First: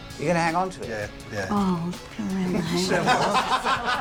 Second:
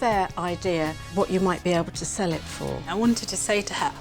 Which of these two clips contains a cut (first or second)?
second